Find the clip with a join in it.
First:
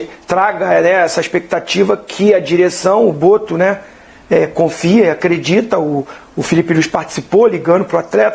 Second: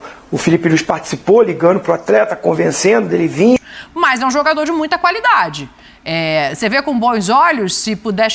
second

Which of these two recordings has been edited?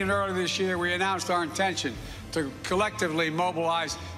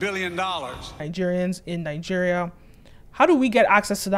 second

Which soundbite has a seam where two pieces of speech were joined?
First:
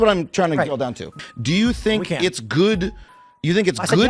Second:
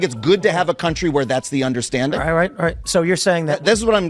first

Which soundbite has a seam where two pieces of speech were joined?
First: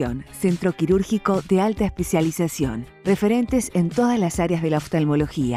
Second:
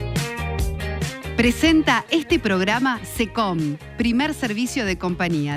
second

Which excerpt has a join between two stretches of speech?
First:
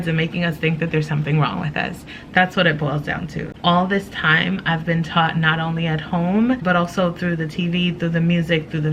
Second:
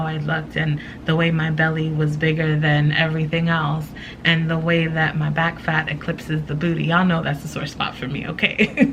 first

